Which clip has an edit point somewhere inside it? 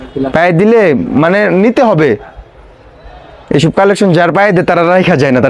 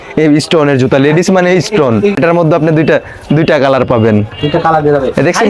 second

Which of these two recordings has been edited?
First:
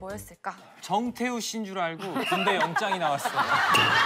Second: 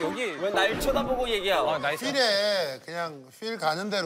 second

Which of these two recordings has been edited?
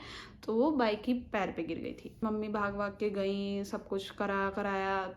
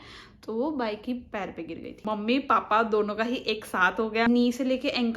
second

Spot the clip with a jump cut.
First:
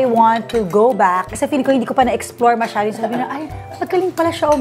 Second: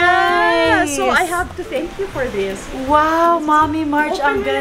first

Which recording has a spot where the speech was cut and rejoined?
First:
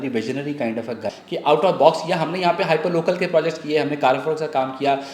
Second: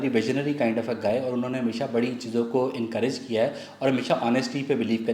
first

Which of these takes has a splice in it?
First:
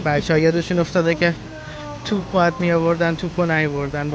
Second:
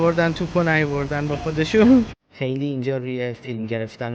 second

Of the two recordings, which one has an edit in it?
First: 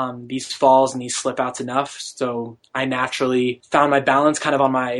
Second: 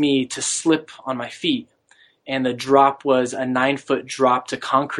first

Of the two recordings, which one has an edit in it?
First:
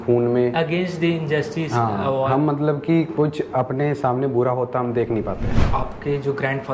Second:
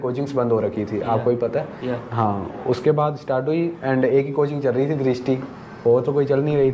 first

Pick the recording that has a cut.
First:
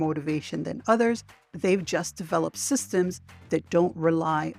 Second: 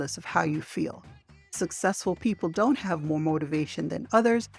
second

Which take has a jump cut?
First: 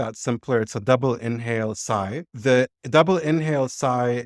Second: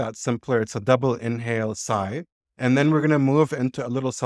first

